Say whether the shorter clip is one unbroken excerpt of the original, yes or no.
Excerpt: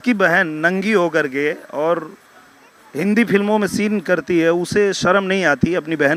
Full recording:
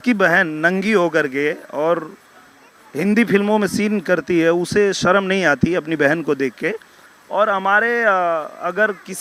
yes